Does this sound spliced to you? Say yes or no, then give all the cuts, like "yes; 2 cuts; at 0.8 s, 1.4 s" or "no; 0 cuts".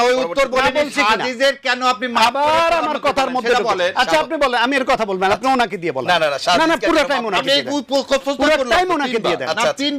no; 0 cuts